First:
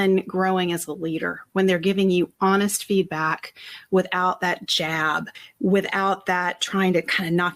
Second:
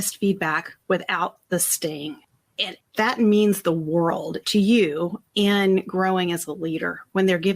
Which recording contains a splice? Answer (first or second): second